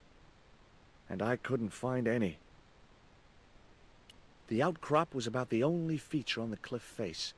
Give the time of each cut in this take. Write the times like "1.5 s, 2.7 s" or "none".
1.1 s, 2.4 s, 4.5 s